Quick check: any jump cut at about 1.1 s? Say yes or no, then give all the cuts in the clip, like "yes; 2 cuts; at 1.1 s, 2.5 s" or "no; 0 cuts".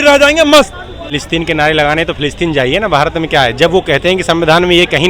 yes; 1 cut; at 1.1 s